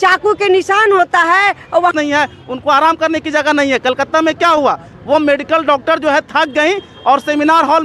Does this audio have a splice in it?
yes; 1 cut; at 1.9 s

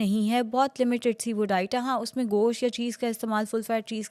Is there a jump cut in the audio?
no; 0 cuts

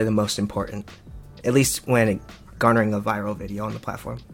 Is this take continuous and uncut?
yes; 0 cuts

